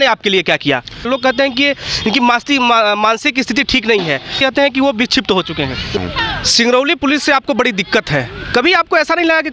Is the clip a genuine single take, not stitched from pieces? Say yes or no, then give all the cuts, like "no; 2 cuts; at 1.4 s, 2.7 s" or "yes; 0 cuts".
no; 3 cuts; at 1.1 s, 4.3 s, 6.0 s